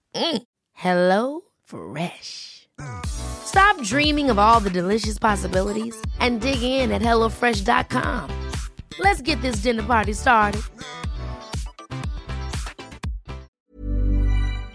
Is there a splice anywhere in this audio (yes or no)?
yes